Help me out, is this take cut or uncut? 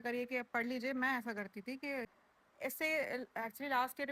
cut